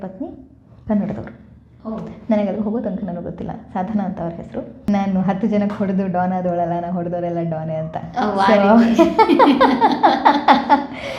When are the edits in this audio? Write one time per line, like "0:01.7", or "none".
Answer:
0:04.9